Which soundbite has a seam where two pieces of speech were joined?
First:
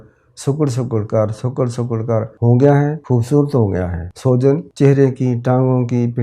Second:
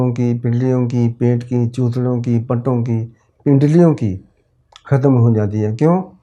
first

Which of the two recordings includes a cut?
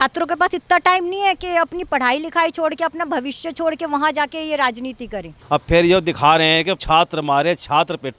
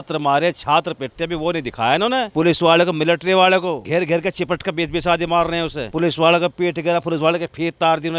first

